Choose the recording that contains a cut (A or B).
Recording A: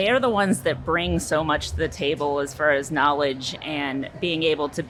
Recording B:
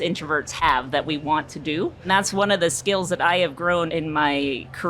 B